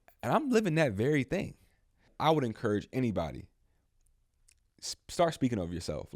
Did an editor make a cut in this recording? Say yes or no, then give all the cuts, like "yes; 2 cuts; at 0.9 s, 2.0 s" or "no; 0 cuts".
yes; 1 cut; at 2.1 s